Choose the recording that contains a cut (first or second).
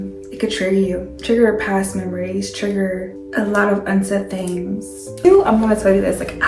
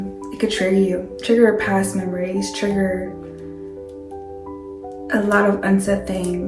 first